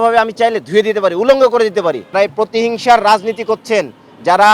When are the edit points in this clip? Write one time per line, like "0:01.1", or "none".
0:02.1

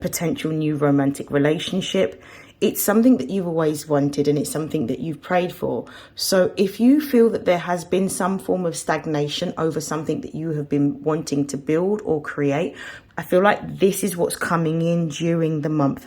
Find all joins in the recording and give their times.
0:12.9

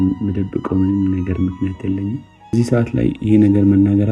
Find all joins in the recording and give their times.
0:02.3

